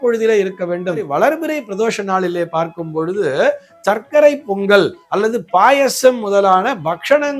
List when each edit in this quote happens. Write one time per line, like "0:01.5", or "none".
0:01.1